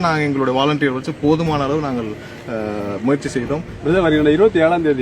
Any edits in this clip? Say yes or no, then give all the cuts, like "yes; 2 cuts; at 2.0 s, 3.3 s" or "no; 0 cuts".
yes; 1 cut; at 3.7 s